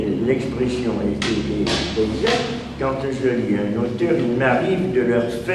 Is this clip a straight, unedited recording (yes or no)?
yes